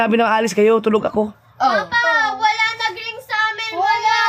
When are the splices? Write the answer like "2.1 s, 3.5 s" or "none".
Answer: none